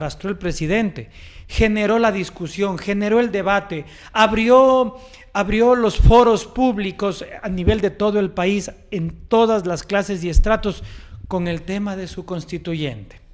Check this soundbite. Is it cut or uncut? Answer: uncut